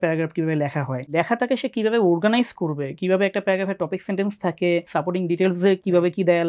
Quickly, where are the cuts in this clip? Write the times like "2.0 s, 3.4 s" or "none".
1.1 s, 4.9 s